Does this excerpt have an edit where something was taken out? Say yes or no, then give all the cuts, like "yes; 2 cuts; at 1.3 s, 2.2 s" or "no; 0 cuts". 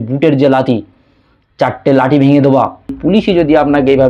yes; 1 cut; at 3.0 s